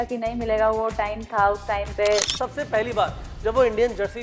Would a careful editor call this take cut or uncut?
cut